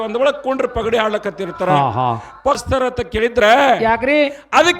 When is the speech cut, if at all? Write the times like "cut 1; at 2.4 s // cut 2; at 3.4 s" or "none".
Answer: cut 1; at 2.6 s